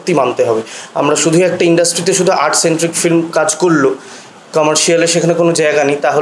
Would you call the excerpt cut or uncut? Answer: uncut